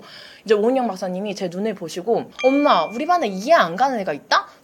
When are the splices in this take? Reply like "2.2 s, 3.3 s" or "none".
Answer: 2.3 s